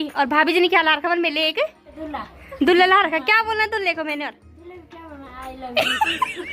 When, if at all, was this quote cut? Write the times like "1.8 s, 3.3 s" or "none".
1.9 s